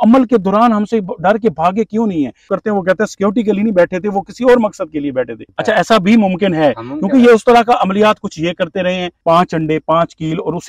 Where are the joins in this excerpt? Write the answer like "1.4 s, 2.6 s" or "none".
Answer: 2.5 s, 5.4 s, 9.1 s